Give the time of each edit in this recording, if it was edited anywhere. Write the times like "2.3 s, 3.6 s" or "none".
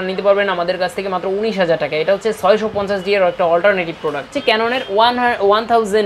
4.3 s